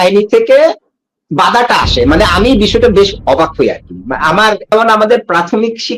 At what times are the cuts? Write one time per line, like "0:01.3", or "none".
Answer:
0:04.7